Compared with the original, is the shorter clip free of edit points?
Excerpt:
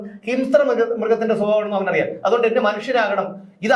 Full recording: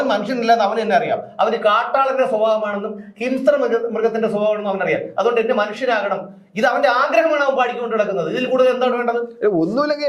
yes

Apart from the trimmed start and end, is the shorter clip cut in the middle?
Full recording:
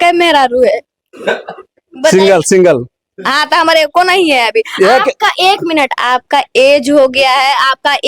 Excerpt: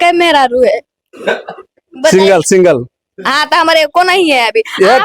no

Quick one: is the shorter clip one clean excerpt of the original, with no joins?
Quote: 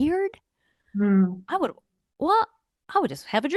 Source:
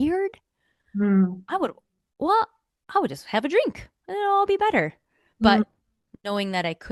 yes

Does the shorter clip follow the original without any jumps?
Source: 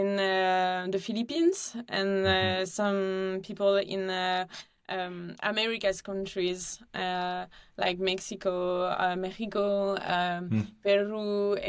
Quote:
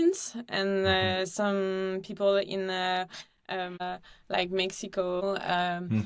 no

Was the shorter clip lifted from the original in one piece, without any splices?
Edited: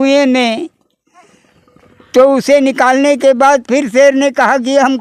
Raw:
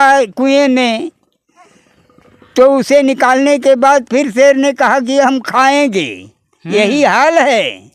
yes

